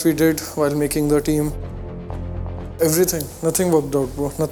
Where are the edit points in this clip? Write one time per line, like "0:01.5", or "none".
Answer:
none

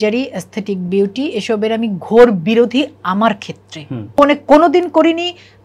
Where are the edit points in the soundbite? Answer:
0:04.2

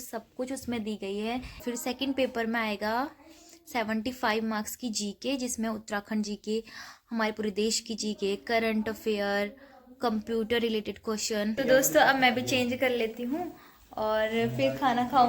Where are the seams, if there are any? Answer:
0:01.6
0:11.6

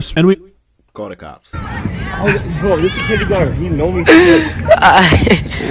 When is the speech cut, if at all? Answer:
0:01.5

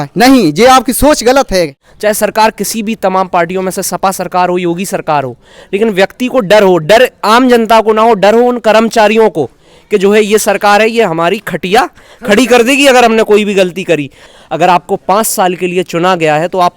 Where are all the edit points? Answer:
0:01.8
0:14.2

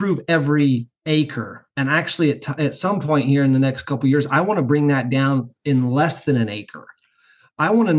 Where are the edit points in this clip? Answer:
0:00.9

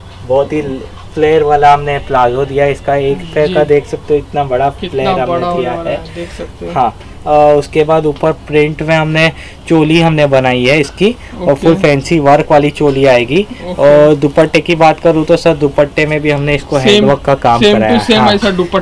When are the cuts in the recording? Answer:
none

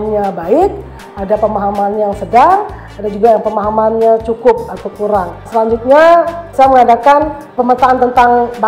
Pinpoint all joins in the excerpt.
0:05.4
0:06.5
0:07.5

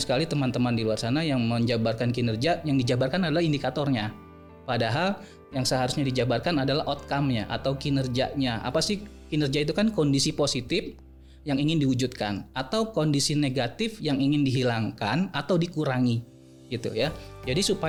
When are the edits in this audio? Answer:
none

